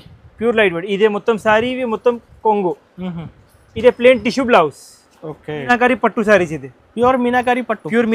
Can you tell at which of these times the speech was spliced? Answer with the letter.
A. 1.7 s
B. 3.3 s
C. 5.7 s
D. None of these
C